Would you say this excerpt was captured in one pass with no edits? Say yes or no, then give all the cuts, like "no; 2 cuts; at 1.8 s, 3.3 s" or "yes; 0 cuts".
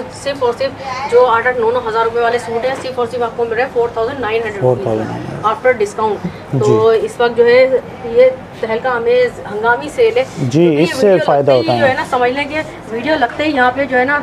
yes; 0 cuts